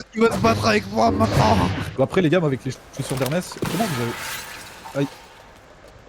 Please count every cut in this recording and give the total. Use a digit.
1